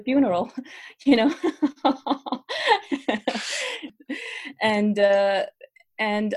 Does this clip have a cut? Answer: yes; 1 cut; at 3.9 s

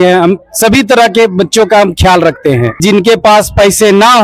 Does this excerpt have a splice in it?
yes; 1 cut; at 2.8 s

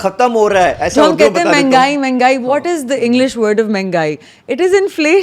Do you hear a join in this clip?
no; 0 cuts

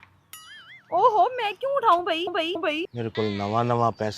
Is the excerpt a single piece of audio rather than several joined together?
no; 1 cut; at 2.6 s

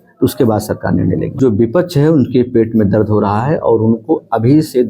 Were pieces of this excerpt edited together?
yes; 1 cut; at 1.4 s

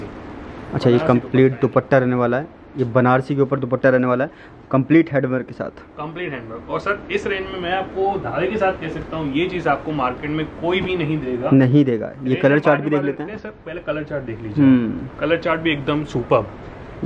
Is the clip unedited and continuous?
yes; 0 cuts

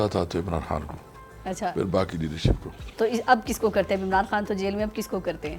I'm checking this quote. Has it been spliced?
no; 0 cuts

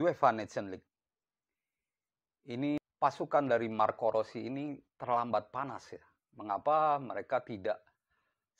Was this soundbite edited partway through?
yes; 1 cut; at 2.8 s

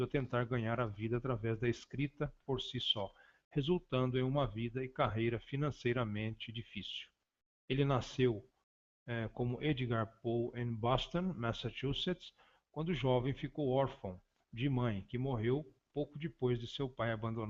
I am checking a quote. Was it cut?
no; 0 cuts

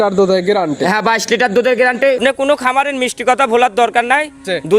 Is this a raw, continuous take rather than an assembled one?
no; 1 cut; at 2.2 s

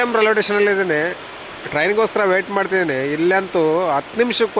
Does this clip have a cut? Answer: no; 0 cuts

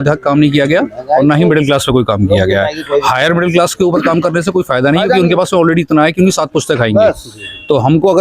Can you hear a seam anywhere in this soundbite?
no; 0 cuts

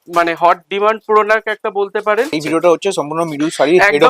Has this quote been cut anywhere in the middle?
yes; 1 cut; at 2.4 s

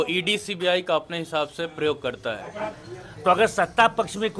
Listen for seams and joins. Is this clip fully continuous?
no; 1 cut; at 2.8 s

